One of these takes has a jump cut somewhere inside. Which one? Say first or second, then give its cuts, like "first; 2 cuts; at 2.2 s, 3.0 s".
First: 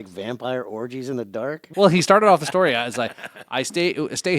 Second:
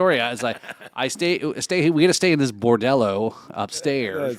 first; 1 cut; at 1.6 s